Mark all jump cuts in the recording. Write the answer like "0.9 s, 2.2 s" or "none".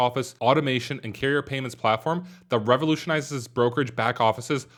none